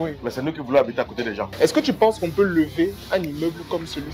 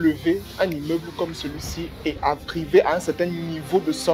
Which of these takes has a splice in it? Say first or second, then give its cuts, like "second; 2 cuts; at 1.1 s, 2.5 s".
first; 1 cut; at 1.5 s